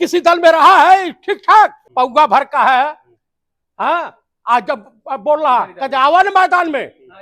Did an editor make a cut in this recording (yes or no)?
yes